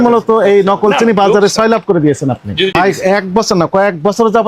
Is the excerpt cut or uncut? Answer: cut